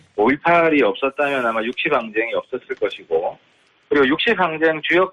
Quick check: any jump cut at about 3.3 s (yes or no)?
no